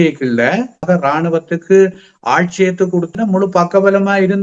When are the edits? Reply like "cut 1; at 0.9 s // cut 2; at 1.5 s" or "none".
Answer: cut 1; at 0.8 s // cut 2; at 3.1 s